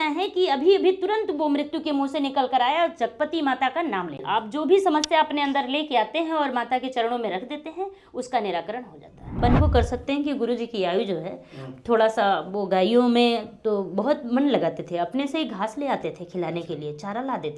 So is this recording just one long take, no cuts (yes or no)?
no